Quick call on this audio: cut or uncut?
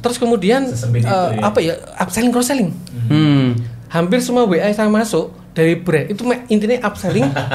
uncut